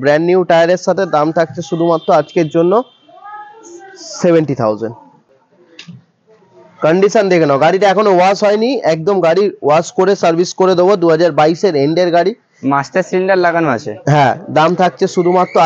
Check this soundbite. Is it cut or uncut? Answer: cut